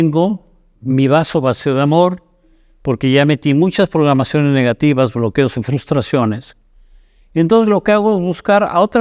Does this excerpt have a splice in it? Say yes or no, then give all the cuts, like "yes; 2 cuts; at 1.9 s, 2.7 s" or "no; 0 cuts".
no; 0 cuts